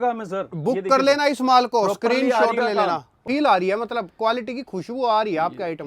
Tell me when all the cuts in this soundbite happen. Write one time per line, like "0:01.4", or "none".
0:03.1